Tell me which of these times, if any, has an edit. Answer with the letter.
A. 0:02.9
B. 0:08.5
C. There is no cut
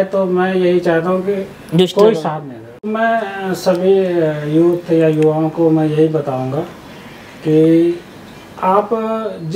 A